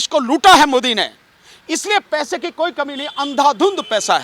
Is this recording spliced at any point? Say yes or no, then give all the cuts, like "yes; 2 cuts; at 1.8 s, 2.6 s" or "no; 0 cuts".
no; 0 cuts